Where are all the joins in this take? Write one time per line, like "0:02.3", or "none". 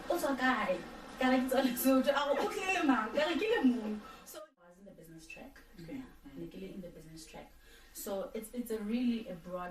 0:04.1